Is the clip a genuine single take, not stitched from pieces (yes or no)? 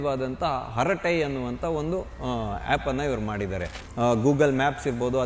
no